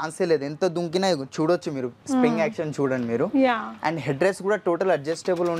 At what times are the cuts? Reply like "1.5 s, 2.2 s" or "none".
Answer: none